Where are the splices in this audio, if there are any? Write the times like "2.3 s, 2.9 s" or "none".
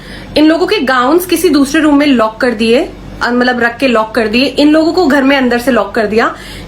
none